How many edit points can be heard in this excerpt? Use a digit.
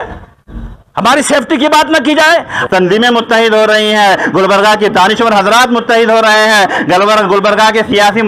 1